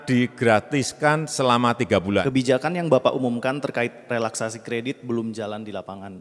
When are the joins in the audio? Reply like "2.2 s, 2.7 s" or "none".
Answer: 2.2 s